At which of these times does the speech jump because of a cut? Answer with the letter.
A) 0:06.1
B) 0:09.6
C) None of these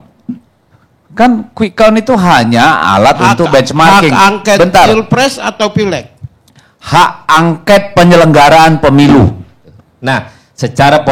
B